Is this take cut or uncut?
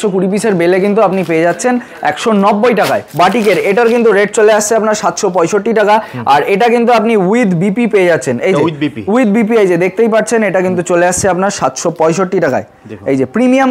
cut